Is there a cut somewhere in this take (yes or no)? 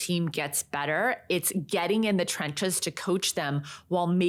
no